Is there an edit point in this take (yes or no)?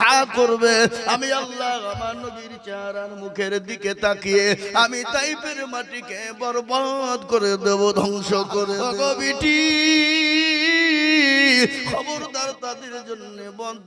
yes